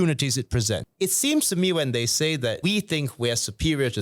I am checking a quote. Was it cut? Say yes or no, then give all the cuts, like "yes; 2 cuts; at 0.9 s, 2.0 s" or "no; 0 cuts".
yes; 2 cuts; at 0.9 s, 2.6 s